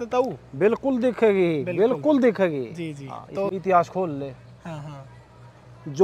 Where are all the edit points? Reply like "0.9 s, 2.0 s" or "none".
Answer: 3.5 s